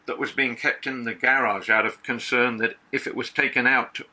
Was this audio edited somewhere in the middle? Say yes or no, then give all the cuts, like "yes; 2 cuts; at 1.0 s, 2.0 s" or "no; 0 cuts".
no; 0 cuts